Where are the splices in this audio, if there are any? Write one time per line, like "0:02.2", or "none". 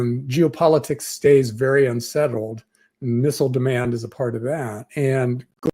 0:04.8